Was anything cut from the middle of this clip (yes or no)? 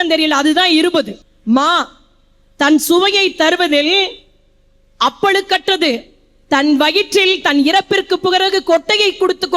yes